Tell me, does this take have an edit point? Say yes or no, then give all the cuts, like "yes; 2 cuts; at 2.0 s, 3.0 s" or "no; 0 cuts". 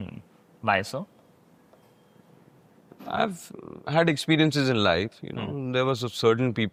no; 0 cuts